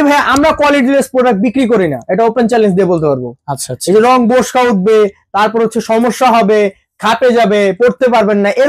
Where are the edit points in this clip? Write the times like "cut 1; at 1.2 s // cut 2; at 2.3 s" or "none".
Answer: none